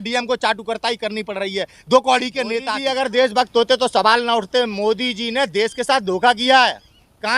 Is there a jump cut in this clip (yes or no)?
yes